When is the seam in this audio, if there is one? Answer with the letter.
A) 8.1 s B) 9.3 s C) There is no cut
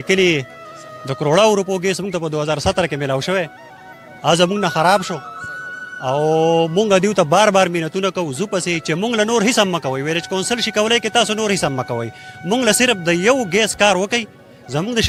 C